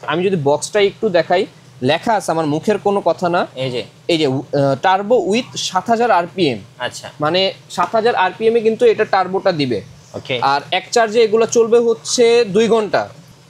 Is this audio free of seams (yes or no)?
yes